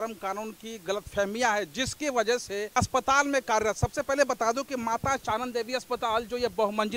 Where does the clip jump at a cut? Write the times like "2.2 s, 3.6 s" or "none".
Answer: 2.7 s